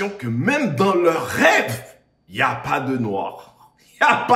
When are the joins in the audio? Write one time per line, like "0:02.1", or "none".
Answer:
none